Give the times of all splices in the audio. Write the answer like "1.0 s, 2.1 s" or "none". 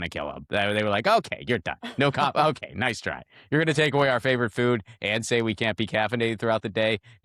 none